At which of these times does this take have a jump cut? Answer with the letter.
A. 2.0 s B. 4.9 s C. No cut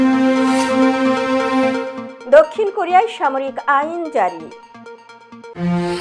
C